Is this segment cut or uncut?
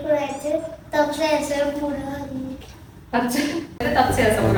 uncut